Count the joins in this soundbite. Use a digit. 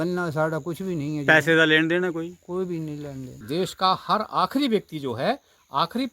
1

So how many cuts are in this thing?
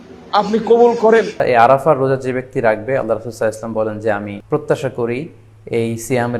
2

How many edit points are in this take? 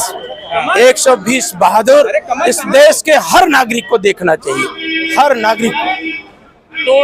0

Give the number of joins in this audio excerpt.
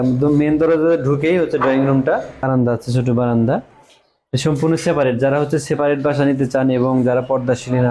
1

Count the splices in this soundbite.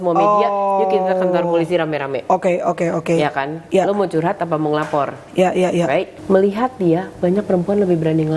1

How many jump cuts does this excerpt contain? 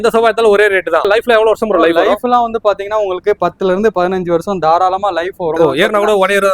2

